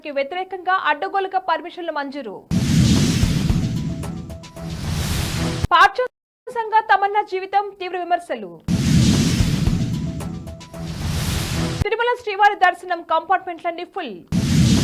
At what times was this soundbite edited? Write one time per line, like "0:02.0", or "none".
none